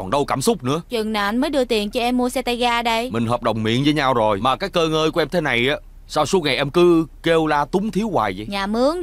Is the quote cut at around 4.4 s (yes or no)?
yes